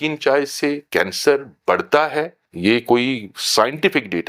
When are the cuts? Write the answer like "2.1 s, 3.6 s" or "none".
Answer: 2.4 s

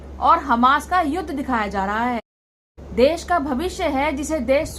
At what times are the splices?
2.6 s

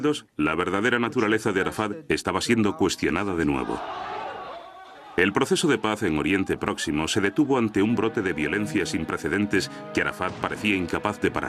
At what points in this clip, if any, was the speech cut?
none

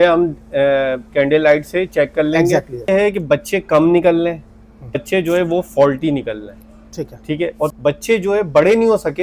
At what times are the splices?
2.9 s, 5.0 s, 7.8 s

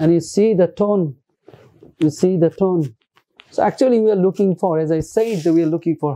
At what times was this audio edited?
none

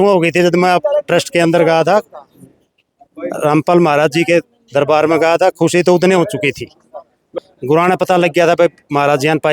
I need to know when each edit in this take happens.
7.2 s

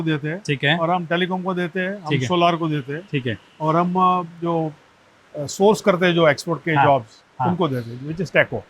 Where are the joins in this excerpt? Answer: none

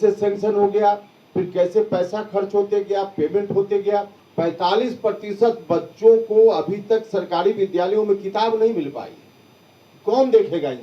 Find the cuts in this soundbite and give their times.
4.2 s

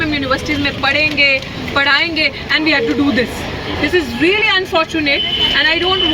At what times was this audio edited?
none

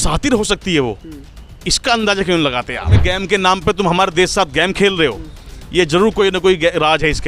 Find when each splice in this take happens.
3.0 s

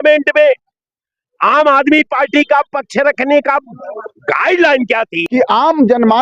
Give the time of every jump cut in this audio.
5.2 s

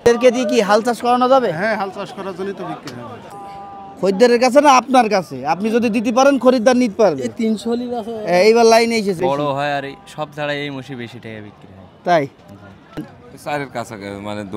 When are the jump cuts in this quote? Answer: 3.3 s, 9.2 s, 13.1 s

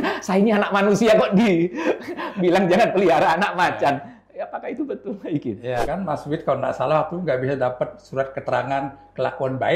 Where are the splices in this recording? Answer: 5.9 s

